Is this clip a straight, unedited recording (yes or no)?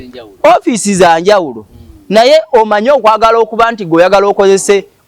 yes